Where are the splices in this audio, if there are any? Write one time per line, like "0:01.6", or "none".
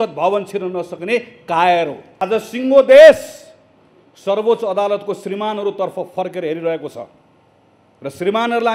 0:02.1